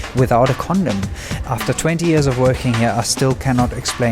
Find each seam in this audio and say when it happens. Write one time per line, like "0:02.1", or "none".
0:01.3